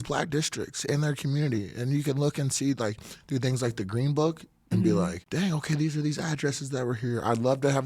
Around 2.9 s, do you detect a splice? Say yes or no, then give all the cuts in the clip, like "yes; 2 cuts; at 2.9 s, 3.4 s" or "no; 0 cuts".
no; 1 cut; at 5.2 s